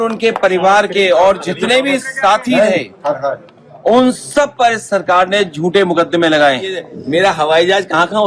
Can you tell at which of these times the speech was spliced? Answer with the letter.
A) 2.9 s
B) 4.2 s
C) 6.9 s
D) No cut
C